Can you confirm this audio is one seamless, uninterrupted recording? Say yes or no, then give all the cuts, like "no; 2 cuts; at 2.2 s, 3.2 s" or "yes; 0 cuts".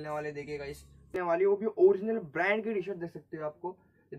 no; 1 cut; at 1.2 s